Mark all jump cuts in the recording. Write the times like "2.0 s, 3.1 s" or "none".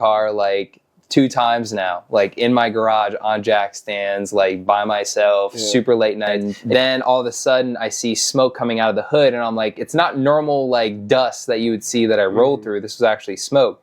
6.5 s